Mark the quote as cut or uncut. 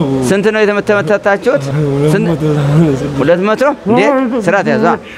cut